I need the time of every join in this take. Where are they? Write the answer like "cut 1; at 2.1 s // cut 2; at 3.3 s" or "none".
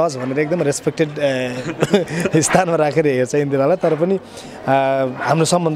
none